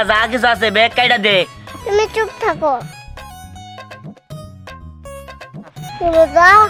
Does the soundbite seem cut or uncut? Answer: uncut